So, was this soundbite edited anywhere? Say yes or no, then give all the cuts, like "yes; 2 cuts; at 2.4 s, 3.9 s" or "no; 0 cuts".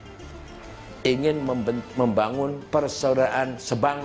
yes; 1 cut; at 2.6 s